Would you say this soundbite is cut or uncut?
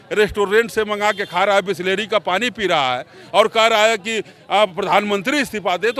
uncut